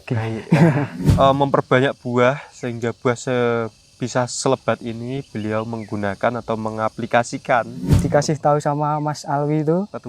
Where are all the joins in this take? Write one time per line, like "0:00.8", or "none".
0:01.0
0:08.0